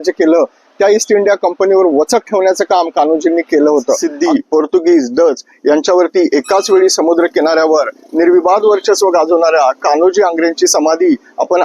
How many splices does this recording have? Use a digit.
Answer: 1